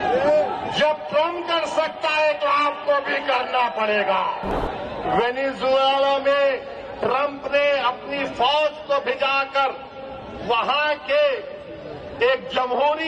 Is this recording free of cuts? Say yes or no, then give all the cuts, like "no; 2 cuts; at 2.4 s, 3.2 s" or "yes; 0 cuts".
no; 1 cut; at 4.5 s